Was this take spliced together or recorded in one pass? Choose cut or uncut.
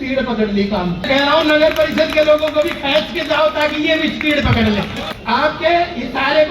cut